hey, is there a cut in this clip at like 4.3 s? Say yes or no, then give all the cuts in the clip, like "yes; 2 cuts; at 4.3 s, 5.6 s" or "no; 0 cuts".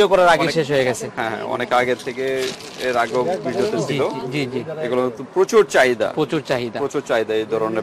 no; 0 cuts